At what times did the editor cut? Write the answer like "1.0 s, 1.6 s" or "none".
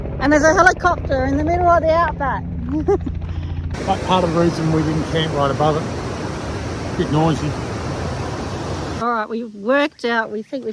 3.7 s, 9.0 s